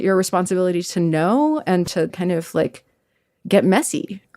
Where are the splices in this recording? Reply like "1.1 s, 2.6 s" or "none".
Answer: 2.1 s